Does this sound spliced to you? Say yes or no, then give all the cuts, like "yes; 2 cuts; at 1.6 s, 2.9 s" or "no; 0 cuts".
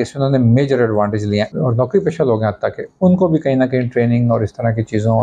yes; 1 cut; at 1.5 s